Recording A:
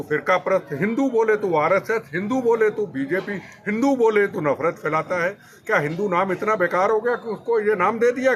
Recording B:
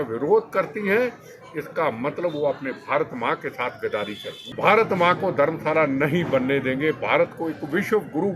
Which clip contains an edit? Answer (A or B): B